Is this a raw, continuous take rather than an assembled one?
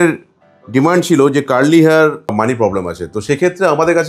no; 1 cut; at 2.3 s

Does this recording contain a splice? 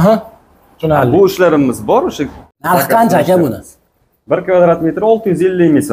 yes; 1 cut; at 2.5 s

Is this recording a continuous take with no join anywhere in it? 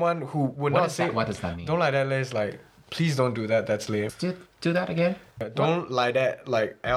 no; 1 cut; at 5.4 s

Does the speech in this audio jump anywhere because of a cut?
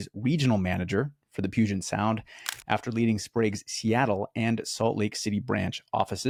no; 0 cuts

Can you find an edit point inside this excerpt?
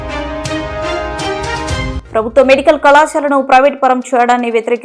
yes; 1 cut; at 1.9 s

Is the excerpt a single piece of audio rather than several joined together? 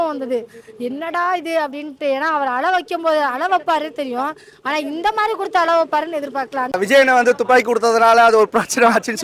no; 1 cut; at 6.8 s

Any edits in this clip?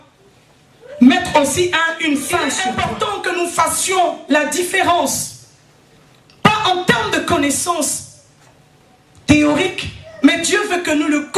yes; 1 cut; at 2.6 s

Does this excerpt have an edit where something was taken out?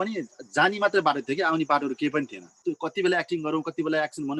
yes; 1 cut; at 2.5 s

